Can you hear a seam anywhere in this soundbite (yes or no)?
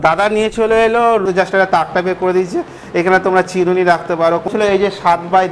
yes